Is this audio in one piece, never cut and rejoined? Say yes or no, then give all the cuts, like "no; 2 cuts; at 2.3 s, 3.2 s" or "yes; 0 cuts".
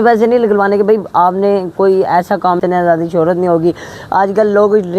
no; 1 cut; at 2.6 s